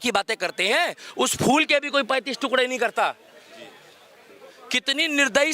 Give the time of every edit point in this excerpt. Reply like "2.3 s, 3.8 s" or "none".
none